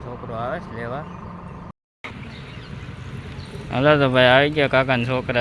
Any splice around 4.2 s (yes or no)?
no